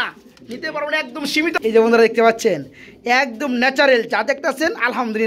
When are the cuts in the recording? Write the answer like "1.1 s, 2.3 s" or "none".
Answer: 1.5 s